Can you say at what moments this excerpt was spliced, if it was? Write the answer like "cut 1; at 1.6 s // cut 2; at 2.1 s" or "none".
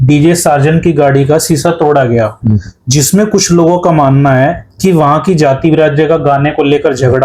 none